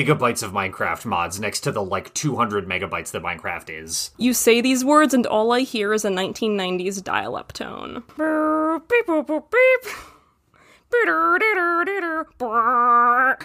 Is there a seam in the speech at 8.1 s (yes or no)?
yes